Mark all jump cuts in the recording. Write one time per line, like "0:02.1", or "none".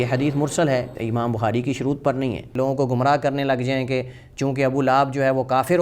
0:00.9
0:02.5